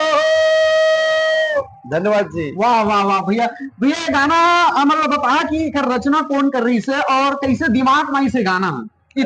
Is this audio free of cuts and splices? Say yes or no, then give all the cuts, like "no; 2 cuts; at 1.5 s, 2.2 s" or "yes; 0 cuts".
yes; 0 cuts